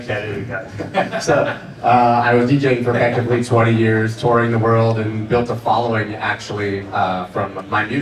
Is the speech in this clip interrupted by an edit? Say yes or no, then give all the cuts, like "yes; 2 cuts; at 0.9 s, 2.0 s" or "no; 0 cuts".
no; 0 cuts